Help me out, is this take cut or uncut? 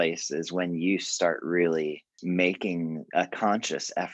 cut